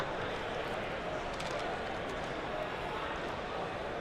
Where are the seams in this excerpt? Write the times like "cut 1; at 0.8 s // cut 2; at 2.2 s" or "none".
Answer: none